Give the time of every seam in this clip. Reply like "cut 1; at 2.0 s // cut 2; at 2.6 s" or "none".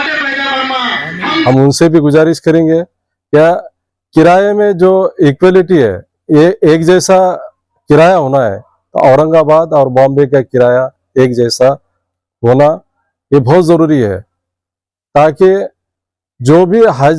cut 1; at 1.4 s